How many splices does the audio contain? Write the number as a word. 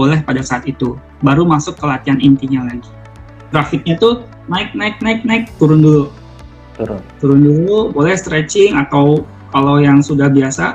one